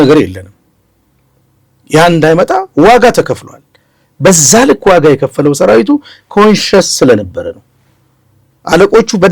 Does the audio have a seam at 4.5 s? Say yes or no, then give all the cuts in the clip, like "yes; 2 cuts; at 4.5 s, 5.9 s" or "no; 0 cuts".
no; 0 cuts